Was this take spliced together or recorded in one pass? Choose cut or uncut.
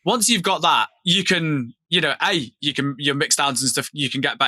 cut